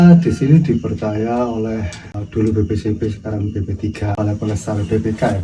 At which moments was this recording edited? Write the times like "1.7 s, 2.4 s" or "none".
2.2 s, 4.1 s